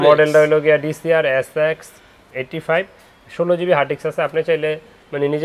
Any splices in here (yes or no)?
no